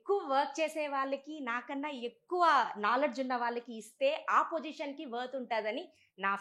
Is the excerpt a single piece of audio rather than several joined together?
yes; 0 cuts

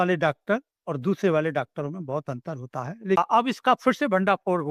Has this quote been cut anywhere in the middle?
yes; 1 cut; at 3.2 s

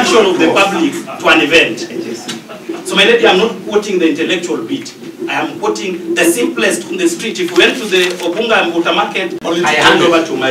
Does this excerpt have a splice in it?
yes; 1 cut; at 9.4 s

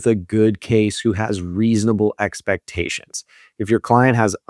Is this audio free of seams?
yes; 0 cuts

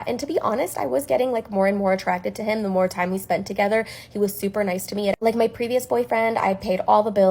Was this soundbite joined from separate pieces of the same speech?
no; 0 cuts

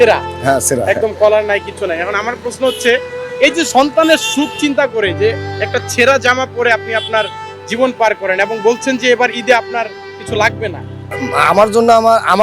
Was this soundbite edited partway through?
yes; 1 cut; at 11.0 s

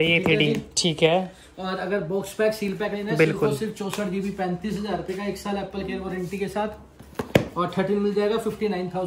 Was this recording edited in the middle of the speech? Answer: no; 0 cuts

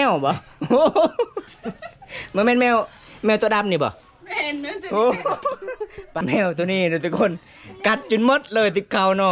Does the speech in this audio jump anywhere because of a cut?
yes; 1 cut; at 6.1 s

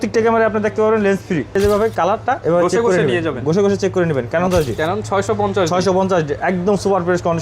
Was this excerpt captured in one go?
no; 2 cuts; at 1.5 s, 4.5 s

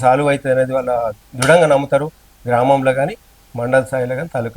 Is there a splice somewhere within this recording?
yes; 1 cut; at 1.3 s

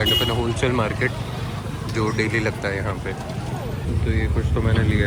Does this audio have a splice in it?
yes; 1 cut; at 3.8 s

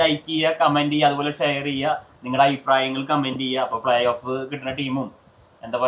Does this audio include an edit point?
no; 0 cuts

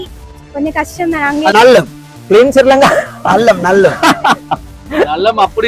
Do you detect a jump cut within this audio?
yes; 1 cut; at 1.5 s

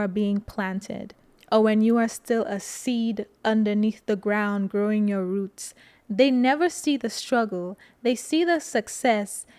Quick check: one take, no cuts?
yes; 0 cuts

